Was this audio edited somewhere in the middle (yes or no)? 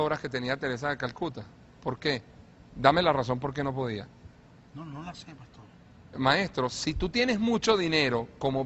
yes